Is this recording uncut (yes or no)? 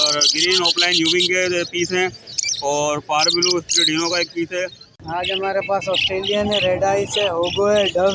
no